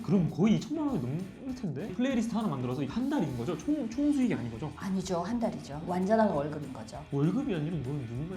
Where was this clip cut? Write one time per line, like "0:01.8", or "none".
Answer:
0:01.9
0:05.7